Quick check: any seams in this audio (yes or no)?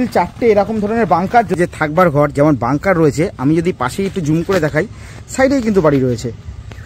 yes